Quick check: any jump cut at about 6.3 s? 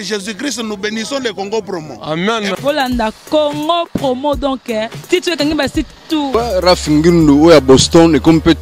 yes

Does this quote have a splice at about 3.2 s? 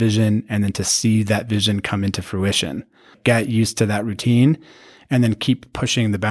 yes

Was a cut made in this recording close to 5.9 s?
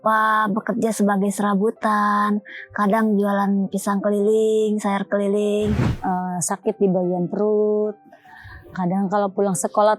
yes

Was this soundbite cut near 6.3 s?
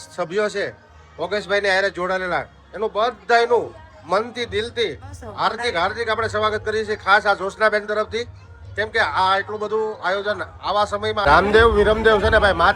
no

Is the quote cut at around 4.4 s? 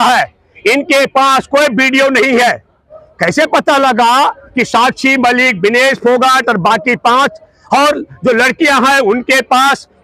no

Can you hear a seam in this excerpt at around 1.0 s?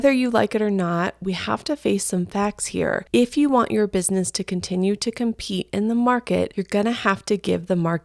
no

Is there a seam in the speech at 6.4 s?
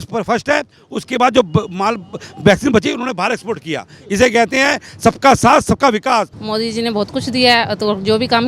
yes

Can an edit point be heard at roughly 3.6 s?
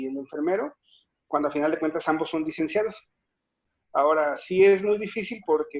yes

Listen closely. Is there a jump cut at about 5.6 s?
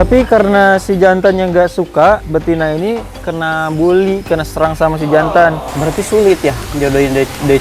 yes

